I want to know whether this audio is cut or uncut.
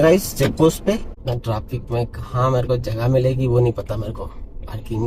cut